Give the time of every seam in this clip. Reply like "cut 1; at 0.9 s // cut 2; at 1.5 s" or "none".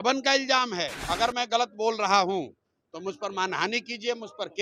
cut 1; at 1.1 s